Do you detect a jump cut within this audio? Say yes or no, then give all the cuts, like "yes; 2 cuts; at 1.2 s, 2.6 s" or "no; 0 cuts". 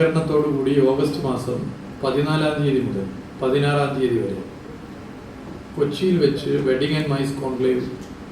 no; 0 cuts